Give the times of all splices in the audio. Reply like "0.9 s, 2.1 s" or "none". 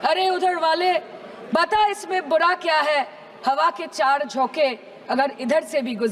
none